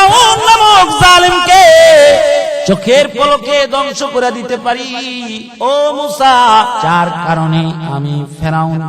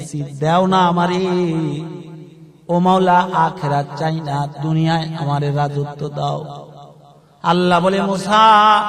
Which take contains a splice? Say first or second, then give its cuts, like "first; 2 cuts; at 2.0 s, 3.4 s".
first; 2 cuts; at 2.6 s, 6.8 s